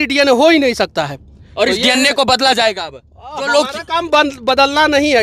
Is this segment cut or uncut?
uncut